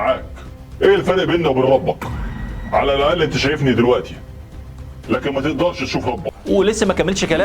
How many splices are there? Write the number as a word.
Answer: one